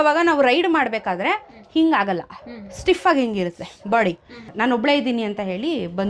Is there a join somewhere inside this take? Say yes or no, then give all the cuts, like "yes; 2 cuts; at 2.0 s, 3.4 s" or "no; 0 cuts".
yes; 1 cut; at 4.5 s